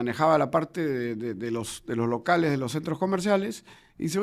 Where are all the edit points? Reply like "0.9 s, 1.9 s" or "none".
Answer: none